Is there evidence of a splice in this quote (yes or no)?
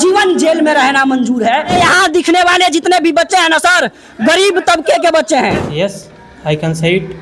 yes